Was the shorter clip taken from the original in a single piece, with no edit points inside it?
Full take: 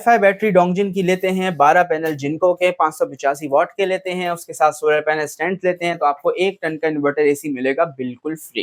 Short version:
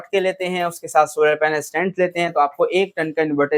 yes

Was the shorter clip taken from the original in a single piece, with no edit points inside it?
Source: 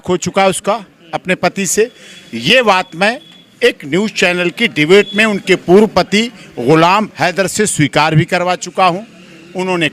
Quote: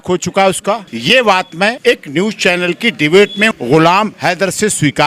no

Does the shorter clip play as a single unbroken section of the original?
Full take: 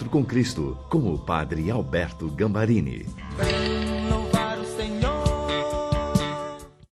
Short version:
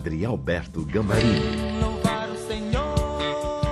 no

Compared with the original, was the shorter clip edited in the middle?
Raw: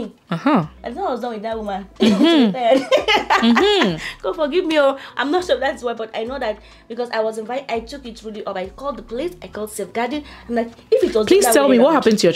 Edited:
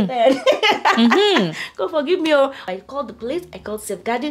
yes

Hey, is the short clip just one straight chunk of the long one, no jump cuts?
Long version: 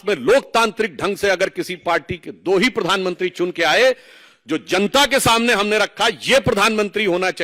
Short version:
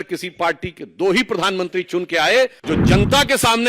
no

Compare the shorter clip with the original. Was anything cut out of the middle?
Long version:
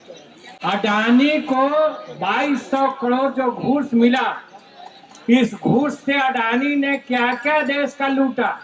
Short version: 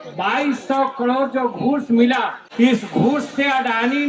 yes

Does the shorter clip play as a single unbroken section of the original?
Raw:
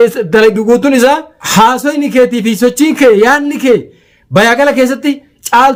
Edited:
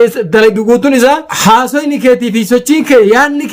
no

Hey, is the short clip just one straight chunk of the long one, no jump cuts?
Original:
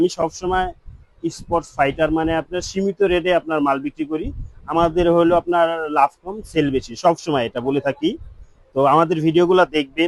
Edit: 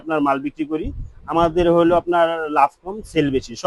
yes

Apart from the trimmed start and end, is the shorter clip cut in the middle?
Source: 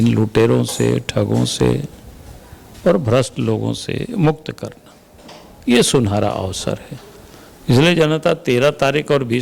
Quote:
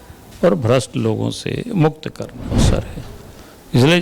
yes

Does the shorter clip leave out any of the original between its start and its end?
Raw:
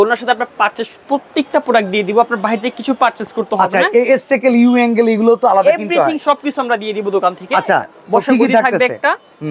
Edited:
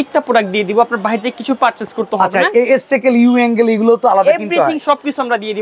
no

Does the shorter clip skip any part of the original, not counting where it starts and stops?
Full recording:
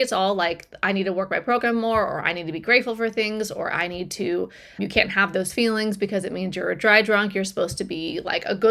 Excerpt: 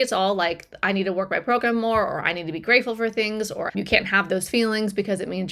yes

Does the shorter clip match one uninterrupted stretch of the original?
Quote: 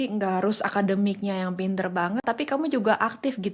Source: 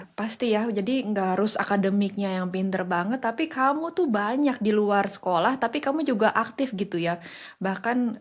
no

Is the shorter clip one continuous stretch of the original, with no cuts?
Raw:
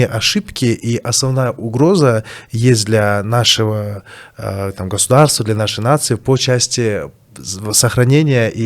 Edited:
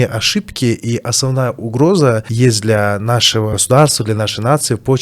no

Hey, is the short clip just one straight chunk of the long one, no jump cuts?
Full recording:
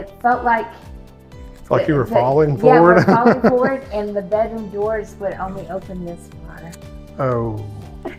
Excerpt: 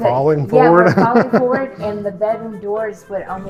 yes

